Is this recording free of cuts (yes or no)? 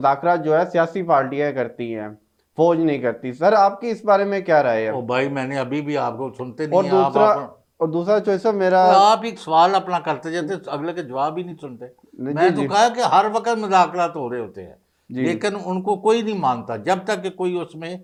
yes